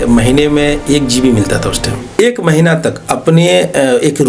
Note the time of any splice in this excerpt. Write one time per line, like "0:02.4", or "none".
0:02.1

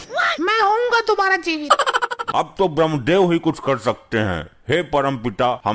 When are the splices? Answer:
0:02.2

